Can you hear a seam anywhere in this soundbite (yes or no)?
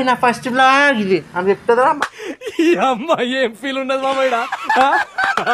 yes